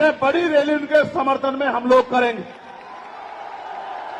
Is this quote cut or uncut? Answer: uncut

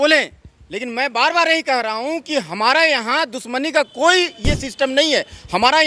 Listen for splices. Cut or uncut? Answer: uncut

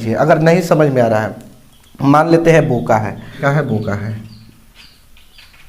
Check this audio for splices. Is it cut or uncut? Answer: cut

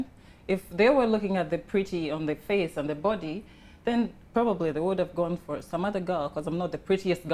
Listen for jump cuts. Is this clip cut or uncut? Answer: uncut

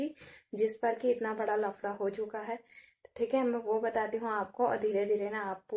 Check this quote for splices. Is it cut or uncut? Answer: uncut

